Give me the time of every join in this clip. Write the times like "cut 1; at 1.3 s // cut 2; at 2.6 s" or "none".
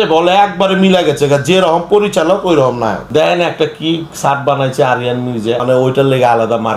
cut 1; at 3.0 s // cut 2; at 5.6 s